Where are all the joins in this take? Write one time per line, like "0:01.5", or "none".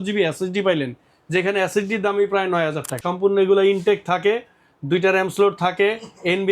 0:03.1